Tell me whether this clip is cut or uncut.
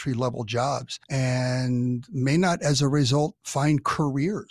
cut